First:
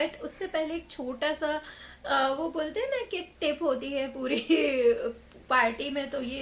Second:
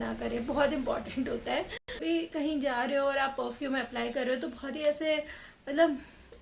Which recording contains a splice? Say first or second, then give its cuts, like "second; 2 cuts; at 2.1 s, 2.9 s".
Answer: second; 1 cut; at 2.0 s